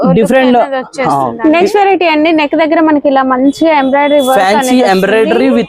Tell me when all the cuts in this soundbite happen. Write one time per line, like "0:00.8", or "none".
0:01.3